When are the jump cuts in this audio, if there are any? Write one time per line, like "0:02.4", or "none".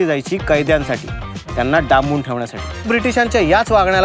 0:02.9